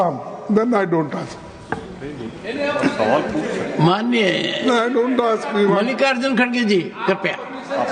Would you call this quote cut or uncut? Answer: uncut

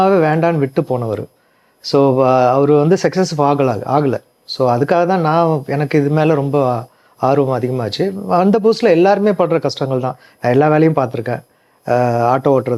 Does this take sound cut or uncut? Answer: uncut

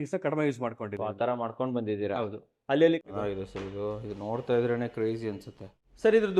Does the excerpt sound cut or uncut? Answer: cut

